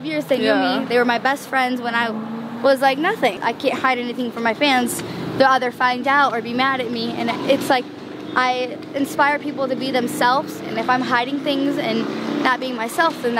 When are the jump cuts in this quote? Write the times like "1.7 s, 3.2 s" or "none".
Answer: 3.4 s